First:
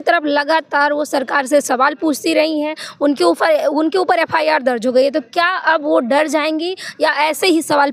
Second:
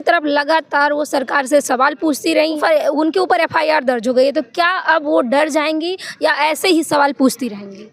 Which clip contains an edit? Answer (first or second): second